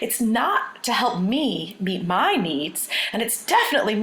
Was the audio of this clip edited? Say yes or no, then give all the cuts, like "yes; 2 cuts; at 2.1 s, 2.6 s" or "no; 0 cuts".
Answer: no; 0 cuts